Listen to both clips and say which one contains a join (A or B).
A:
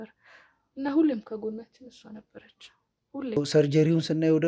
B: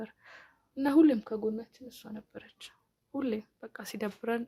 A